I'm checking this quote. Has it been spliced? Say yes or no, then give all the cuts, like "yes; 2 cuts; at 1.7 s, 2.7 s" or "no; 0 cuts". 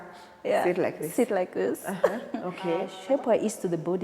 yes; 1 cut; at 3.0 s